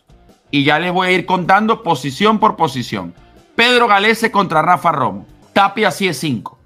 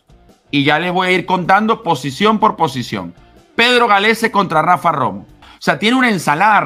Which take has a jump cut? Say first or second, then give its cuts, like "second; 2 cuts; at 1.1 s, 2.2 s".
second; 1 cut; at 5.4 s